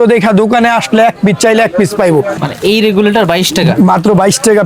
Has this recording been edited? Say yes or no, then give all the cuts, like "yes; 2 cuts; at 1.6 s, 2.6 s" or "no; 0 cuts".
yes; 1 cut; at 2.3 s